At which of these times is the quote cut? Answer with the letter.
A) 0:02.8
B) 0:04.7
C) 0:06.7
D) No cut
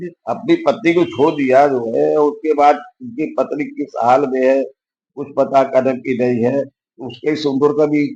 D